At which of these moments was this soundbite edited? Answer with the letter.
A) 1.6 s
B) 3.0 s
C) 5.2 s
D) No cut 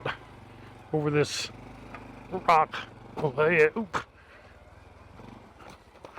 C